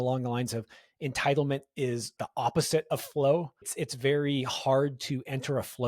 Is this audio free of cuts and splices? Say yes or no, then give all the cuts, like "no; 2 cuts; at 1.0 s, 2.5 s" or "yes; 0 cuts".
no; 2 cuts; at 2.1 s, 3.7 s